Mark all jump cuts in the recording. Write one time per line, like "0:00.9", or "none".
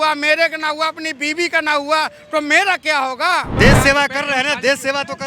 0:03.5

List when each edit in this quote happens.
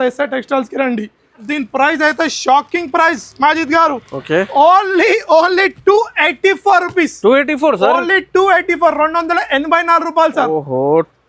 0:01.4

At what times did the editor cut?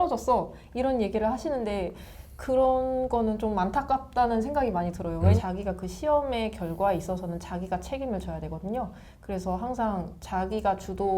0:05.4

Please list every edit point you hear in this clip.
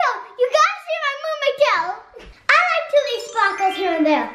0:01.9

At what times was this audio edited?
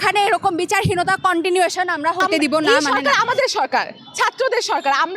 0:02.7

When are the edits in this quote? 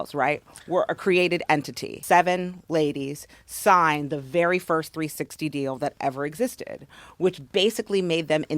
0:01.9

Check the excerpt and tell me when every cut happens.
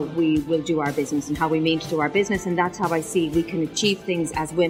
none

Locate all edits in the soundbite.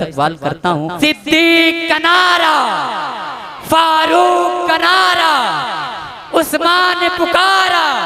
0:00.9

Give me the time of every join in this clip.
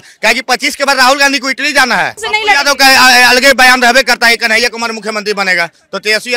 0:02.2

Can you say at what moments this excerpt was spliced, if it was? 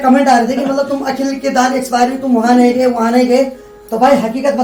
none

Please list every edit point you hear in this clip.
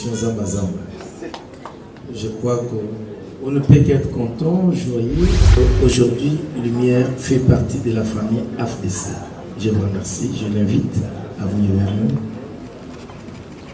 0:05.5

